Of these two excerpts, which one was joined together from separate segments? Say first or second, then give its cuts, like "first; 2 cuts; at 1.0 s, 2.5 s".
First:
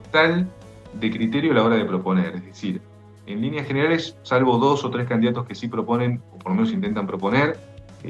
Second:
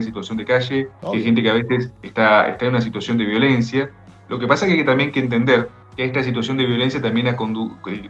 second; 2 cuts; at 1.0 s, 5.8 s